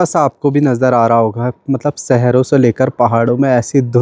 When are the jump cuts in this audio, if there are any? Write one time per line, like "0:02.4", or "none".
none